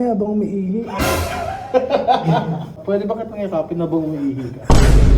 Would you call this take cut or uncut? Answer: uncut